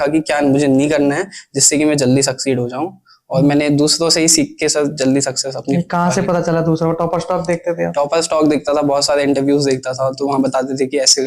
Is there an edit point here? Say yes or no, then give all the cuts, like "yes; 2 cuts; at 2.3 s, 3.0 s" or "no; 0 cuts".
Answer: no; 0 cuts